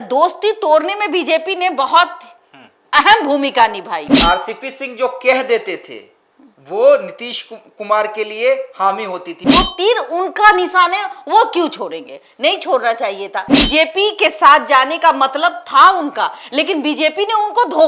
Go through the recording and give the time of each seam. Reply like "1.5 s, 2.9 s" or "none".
4.0 s, 9.4 s, 13.5 s